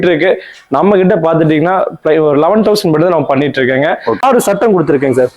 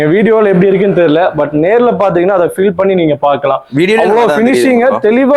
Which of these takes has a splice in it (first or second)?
first